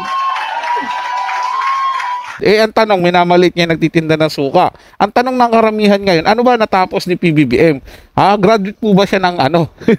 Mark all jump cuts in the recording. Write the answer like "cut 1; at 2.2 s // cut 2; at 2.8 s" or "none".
cut 1; at 2.4 s